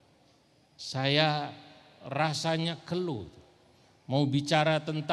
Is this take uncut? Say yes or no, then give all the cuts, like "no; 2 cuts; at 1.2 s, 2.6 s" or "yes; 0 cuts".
yes; 0 cuts